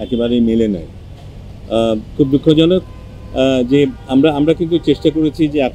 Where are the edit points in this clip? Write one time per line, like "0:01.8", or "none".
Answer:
none

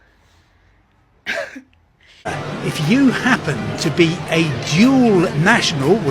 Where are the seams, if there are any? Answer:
0:02.4

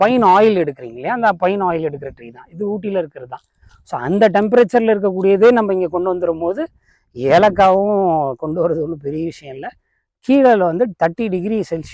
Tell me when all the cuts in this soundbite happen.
none

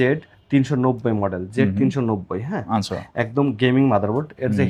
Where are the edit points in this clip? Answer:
none

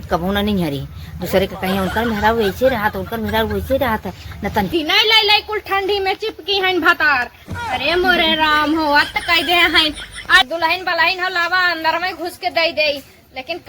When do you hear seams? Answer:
0:04.7
0:10.4

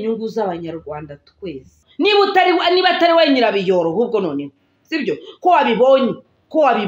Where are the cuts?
0:01.8

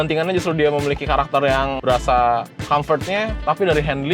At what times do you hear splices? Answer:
0:01.8

